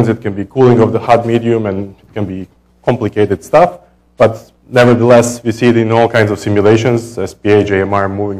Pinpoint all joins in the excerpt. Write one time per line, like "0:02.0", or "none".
0:07.1